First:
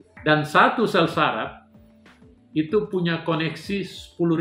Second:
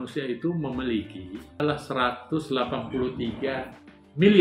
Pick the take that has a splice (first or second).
second